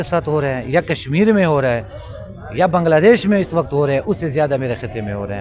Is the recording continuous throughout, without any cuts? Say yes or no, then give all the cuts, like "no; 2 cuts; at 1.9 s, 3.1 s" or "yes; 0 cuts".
yes; 0 cuts